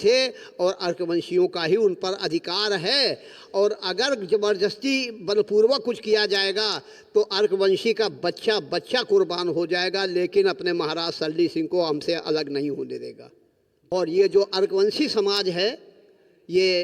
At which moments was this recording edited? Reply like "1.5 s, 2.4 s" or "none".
13.9 s

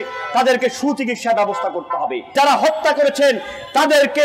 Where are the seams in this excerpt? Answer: 2.3 s

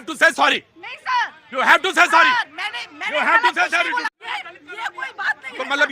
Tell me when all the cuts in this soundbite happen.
4.2 s

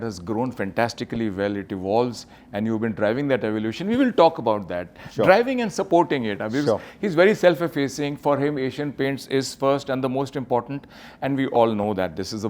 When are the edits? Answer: none

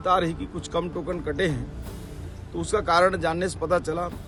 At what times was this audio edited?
none

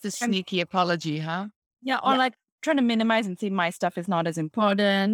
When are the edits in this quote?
none

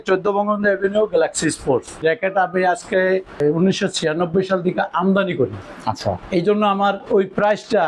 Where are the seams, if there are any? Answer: 2.0 s, 3.4 s, 5.7 s

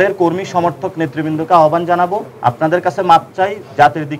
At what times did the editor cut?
2.3 s

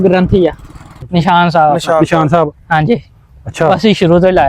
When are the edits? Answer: 1.0 s

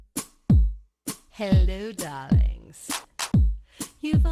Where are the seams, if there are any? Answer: 1.0 s

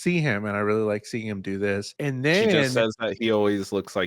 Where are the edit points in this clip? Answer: 1.9 s

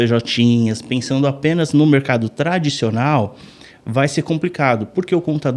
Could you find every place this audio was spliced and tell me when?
none

